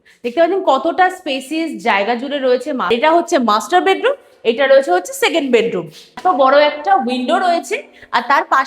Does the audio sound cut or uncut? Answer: cut